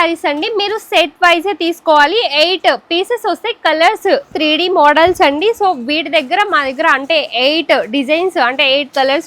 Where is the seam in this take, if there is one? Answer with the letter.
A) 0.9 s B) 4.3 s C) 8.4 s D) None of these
B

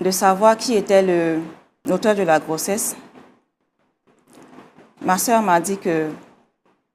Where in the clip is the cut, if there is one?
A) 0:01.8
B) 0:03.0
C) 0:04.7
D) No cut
A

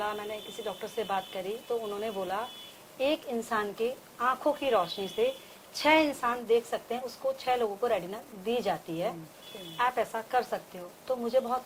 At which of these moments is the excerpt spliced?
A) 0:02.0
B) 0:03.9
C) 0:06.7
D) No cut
D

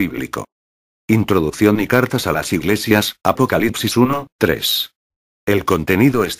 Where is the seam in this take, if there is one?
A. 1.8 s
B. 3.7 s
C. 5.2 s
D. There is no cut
A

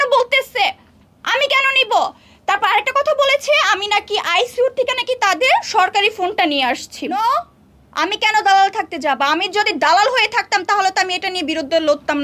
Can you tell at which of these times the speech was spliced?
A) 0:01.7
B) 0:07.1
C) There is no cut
B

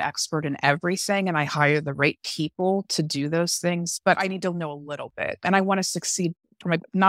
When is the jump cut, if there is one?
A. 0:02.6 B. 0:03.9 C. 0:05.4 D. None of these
C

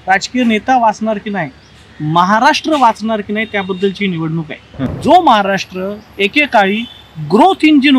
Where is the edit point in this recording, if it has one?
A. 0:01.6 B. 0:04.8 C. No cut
B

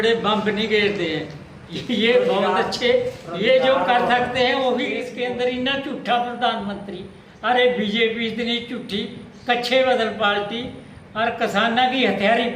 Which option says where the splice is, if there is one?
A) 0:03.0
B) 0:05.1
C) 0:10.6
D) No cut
B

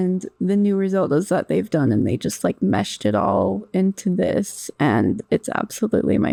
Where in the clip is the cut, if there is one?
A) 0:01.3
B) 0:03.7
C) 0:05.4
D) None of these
D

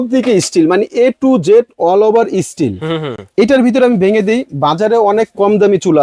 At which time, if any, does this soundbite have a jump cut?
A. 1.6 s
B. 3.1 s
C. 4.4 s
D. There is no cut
D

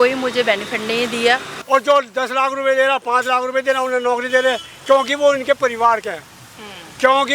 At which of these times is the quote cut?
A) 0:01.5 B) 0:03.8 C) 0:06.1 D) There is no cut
A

